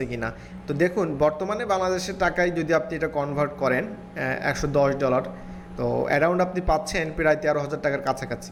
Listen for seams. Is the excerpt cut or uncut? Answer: uncut